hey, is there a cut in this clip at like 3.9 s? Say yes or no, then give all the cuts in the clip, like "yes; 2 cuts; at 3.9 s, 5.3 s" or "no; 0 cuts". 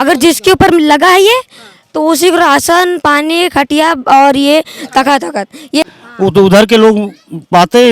no; 1 cut; at 5.9 s